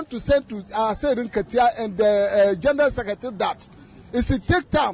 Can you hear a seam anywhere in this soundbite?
no; 0 cuts

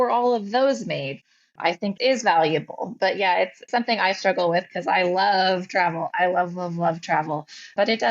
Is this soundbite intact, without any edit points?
yes; 0 cuts

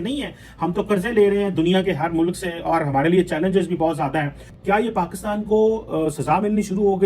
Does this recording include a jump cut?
no; 0 cuts

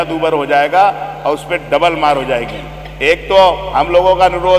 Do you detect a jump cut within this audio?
no; 0 cuts

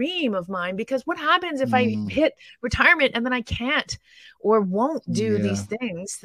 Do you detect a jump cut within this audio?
no; 0 cuts

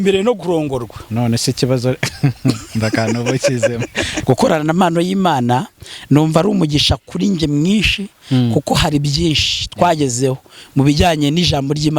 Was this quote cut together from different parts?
yes; 1 cut; at 4.1 s

